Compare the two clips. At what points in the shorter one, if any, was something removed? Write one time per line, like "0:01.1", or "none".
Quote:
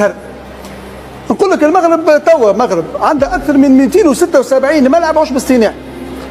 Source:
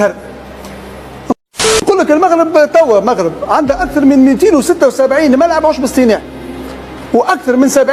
0:01.4